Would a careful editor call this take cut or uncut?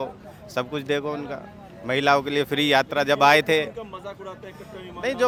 uncut